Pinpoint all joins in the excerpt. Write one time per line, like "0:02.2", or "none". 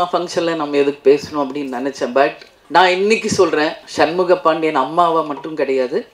0:02.5